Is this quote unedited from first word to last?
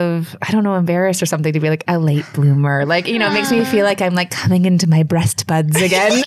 yes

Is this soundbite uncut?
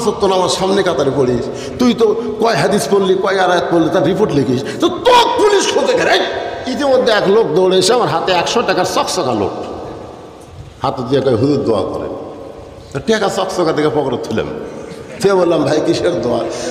no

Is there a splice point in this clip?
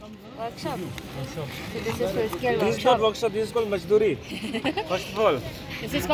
no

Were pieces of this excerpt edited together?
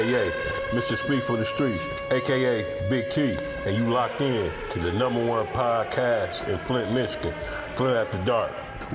no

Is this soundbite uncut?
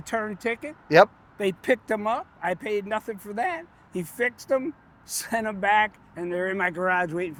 yes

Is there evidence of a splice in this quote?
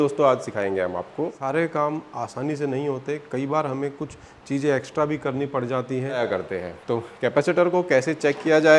yes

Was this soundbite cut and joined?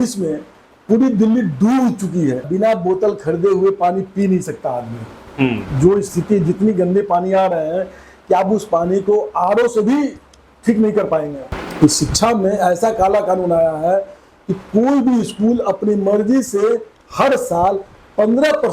yes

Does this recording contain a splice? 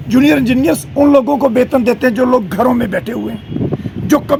no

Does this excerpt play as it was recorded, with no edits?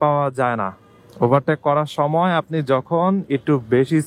yes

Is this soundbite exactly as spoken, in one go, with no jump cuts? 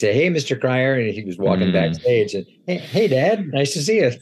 yes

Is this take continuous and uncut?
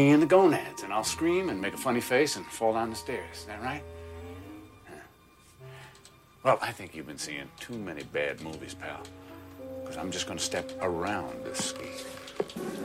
no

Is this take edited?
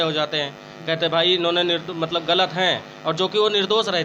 no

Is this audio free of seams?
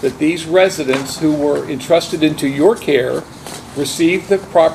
yes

